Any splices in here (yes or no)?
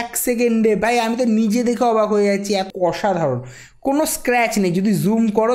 yes